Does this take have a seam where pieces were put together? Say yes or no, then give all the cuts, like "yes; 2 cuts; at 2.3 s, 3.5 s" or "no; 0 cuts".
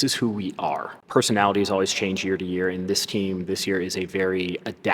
yes; 1 cut; at 1.0 s